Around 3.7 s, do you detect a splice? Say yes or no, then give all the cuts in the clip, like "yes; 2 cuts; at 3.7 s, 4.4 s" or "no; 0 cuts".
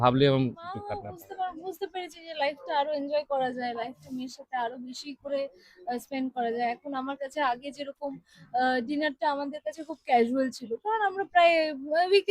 no; 1 cut; at 1.0 s